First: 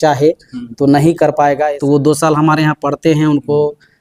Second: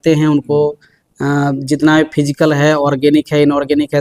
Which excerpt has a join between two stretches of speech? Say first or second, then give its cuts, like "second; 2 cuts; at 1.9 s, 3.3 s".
first; 1 cut; at 1.7 s